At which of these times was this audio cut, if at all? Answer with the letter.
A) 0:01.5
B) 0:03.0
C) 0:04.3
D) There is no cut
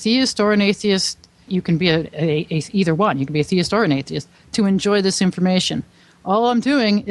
A